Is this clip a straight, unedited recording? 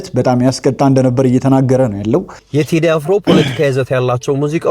no; 1 cut; at 2.3 s

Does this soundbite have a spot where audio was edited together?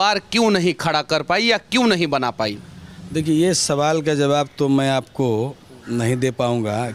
no; 0 cuts

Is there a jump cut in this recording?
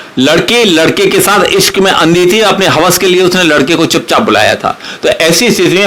no; 0 cuts

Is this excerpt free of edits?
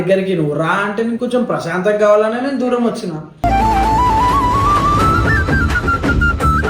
yes; 0 cuts

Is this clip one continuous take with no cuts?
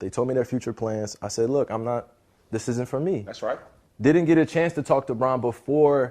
no; 1 cut; at 3.3 s

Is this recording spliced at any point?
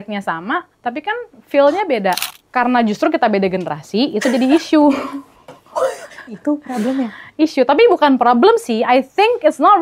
yes; 1 cut; at 2.3 s

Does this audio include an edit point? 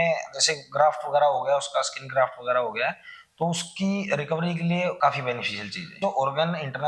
yes; 2 cuts; at 5.0 s, 6.0 s

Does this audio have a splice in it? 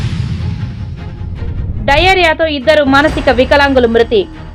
no; 0 cuts

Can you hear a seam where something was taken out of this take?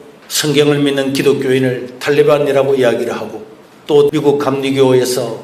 no; 0 cuts

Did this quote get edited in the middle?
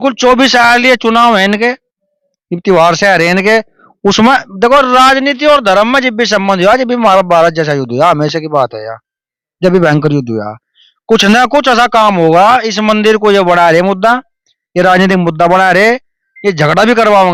no; 0 cuts

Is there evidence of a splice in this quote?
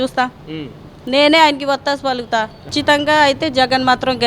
yes; 1 cut; at 2.7 s

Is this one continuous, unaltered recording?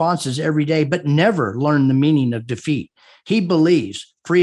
yes; 0 cuts

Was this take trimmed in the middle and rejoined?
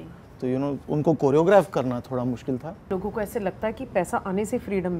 yes; 1 cut; at 2.9 s

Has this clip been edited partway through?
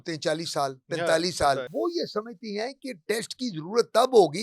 yes; 1 cut; at 1.7 s

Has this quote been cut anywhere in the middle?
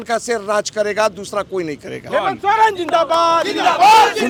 no; 0 cuts

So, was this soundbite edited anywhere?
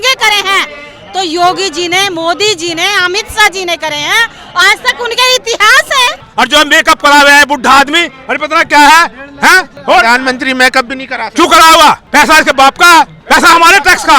yes; 4 cuts; at 6.2 s, 9.7 s, 12.0 s, 13.2 s

